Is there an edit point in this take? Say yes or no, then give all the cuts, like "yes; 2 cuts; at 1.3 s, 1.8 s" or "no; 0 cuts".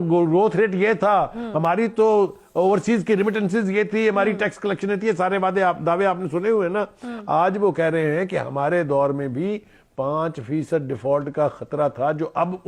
no; 0 cuts